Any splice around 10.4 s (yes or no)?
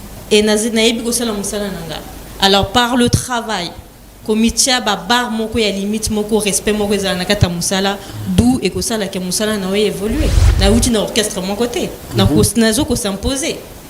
yes